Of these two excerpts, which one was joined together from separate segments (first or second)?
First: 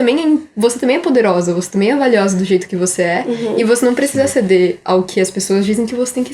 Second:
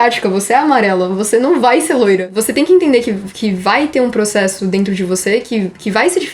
second